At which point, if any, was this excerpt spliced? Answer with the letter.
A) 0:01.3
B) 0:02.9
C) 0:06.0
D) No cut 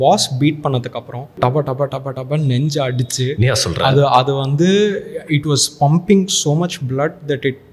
A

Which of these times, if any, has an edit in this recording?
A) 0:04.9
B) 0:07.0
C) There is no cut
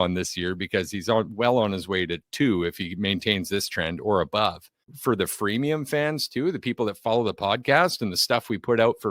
A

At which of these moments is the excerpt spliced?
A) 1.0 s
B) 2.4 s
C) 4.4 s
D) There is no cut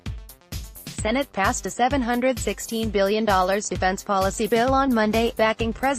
A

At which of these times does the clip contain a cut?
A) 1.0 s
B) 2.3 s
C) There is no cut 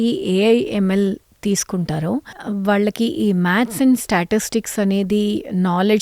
B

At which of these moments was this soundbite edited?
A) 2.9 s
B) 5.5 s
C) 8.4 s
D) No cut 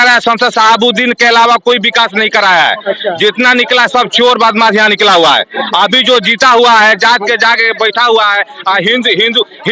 D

